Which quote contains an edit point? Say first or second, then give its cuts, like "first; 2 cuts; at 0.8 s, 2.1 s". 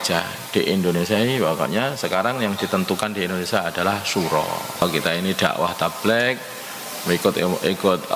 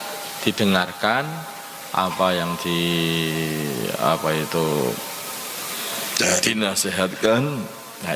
first; 1 cut; at 4.8 s